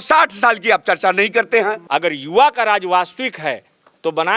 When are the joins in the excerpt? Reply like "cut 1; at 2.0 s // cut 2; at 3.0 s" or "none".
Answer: cut 1; at 1.8 s